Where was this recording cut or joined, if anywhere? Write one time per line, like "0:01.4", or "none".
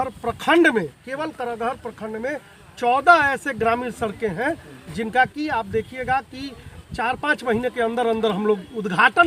none